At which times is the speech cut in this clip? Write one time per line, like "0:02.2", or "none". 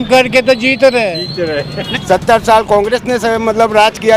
0:01.8